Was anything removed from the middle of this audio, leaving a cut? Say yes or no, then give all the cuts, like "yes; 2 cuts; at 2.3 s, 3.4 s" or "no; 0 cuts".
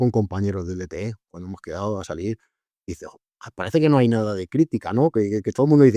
no; 0 cuts